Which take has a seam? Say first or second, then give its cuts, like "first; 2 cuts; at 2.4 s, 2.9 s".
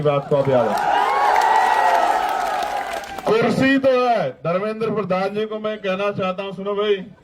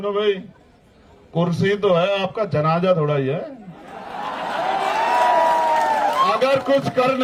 first; 1 cut; at 3.1 s